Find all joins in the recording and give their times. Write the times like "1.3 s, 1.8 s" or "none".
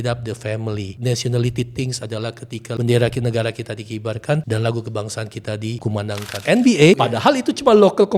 0.9 s, 2.8 s, 4.4 s, 6.0 s, 7.0 s